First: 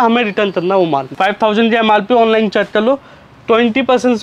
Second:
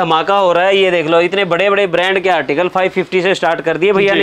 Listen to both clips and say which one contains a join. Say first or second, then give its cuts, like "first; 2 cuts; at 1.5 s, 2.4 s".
first; 1 cut; at 1.1 s